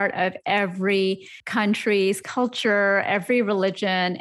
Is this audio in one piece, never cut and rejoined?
no; 1 cut; at 1.3 s

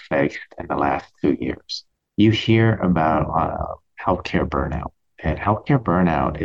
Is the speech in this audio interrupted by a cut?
yes; 1 cut; at 1.7 s

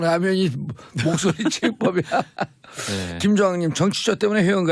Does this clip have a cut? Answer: yes; 1 cut; at 1.8 s

